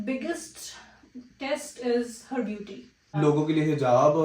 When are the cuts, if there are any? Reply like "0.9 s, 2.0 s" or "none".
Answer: 3.1 s